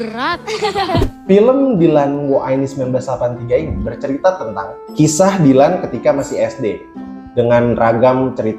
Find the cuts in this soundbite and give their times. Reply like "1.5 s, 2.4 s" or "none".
1.1 s, 4.8 s